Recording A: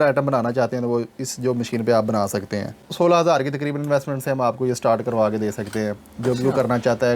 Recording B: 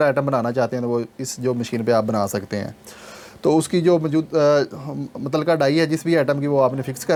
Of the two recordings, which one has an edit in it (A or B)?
A